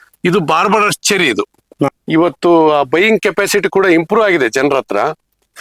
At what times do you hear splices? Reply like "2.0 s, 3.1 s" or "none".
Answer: 1.9 s